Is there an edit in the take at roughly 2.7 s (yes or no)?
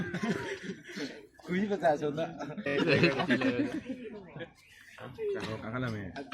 yes